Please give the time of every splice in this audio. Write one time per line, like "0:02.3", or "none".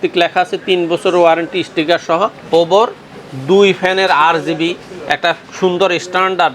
0:02.4